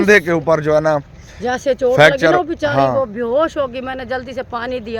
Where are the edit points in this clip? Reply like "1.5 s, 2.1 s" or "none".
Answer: none